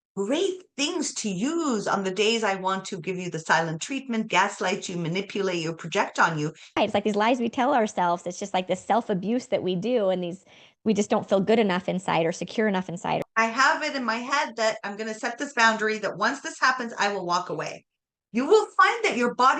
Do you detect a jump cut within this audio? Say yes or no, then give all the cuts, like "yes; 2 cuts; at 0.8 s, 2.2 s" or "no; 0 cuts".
yes; 2 cuts; at 6.8 s, 13.2 s